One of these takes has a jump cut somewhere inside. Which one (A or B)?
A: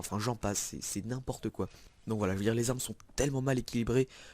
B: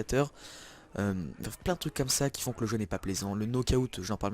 B